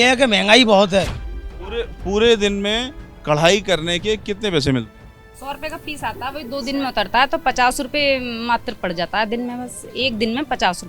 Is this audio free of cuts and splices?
no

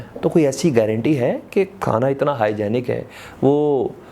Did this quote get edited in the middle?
no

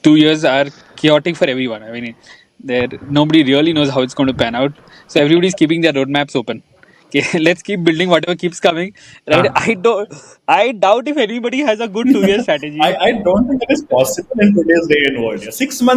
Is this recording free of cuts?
yes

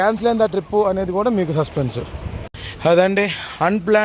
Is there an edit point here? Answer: no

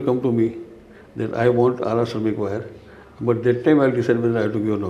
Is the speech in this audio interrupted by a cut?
no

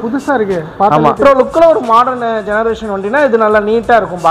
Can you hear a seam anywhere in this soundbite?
yes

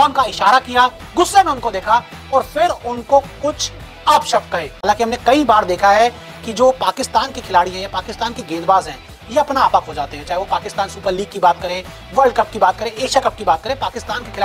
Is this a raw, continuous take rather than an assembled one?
no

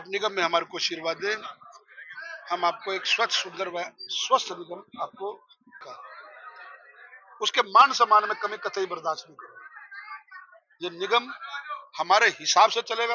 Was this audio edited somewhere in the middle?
yes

